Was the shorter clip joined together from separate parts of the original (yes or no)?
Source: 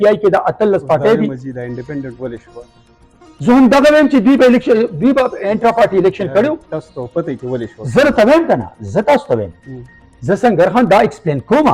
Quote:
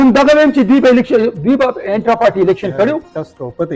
no